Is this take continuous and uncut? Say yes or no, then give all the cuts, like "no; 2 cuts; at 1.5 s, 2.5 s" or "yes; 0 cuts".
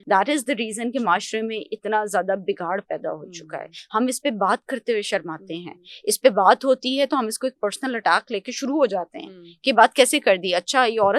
yes; 0 cuts